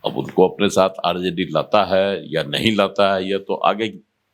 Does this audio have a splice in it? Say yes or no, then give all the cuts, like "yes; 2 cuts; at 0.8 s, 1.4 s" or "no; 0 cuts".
no; 0 cuts